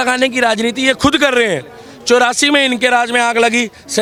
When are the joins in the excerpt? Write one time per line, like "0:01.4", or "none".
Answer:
none

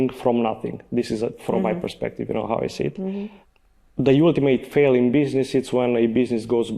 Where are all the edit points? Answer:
0:03.4

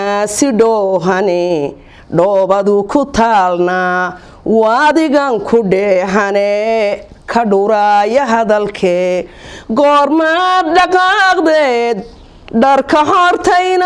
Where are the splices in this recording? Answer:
none

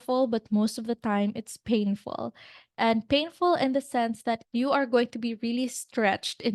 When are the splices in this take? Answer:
0:04.5

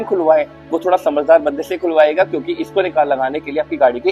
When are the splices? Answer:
none

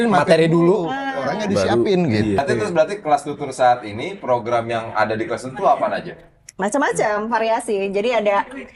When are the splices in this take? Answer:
0:02.4

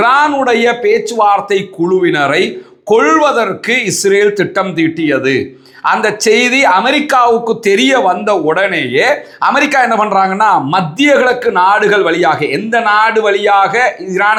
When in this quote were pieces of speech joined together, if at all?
none

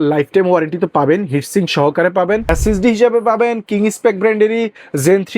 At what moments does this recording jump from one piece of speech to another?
0:02.5

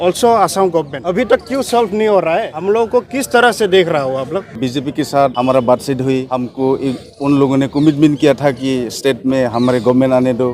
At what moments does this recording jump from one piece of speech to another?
0:01.0
0:02.5
0:04.5
0:05.3
0:06.4

